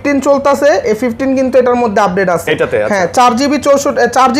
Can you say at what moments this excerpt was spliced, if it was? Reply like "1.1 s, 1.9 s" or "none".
none